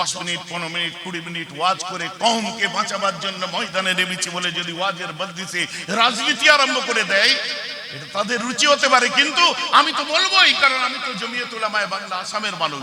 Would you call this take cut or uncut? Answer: uncut